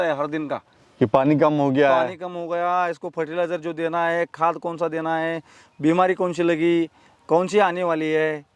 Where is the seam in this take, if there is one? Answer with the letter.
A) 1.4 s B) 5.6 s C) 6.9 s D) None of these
D